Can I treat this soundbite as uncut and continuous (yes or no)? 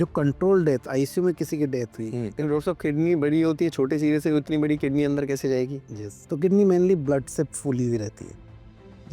no